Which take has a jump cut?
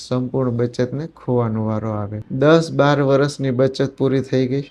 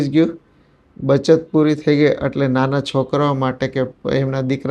first; 1 cut; at 2.2 s

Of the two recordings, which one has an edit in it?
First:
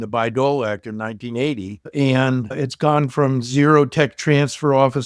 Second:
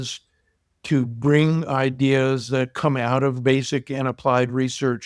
first; 1 cut; at 2.5 s

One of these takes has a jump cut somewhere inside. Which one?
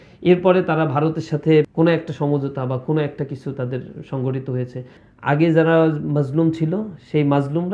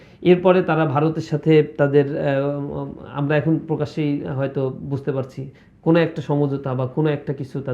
first; 2 cuts; at 1.7 s, 5.0 s

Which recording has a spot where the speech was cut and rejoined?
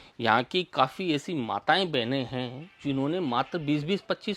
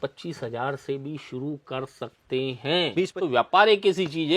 second; 1 cut; at 3.1 s

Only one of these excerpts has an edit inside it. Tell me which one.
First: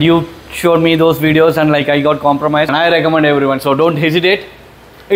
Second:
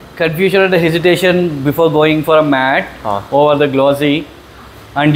first; 1 cut; at 2.7 s

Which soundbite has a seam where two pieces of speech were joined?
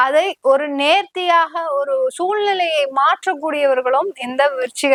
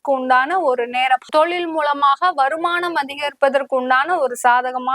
second; 1 cut; at 1.3 s

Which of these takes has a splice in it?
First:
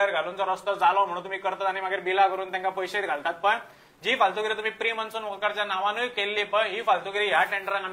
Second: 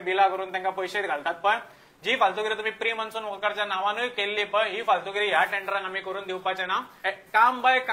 second; 1 cut; at 6.9 s

